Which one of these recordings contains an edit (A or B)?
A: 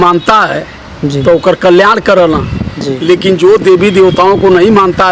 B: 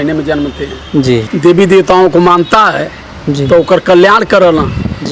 B